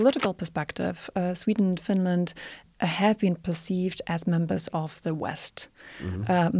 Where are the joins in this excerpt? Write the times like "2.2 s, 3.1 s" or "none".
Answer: 2.6 s